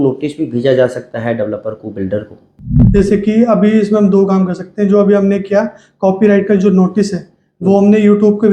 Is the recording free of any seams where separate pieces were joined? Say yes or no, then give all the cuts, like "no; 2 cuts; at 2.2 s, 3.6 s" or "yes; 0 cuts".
no; 1 cut; at 2.8 s